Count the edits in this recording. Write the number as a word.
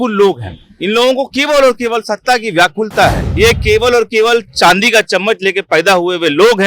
one